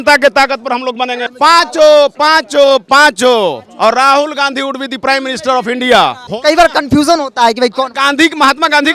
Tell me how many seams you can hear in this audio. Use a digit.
2